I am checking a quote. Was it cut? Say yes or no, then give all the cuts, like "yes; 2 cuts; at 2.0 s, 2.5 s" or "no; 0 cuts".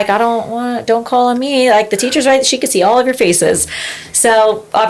no; 0 cuts